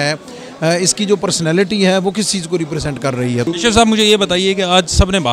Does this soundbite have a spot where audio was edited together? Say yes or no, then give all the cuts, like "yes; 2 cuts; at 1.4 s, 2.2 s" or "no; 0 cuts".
yes; 1 cut; at 3.5 s